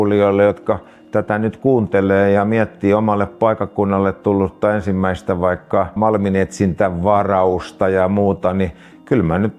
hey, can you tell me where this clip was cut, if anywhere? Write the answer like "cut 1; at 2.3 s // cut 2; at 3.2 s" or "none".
cut 1; at 5.9 s